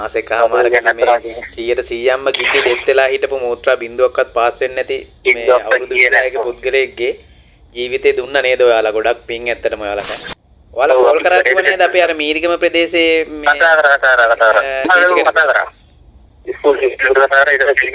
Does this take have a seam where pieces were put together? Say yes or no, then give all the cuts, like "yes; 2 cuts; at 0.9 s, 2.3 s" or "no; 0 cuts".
yes; 2 cuts; at 10.2 s, 14.9 s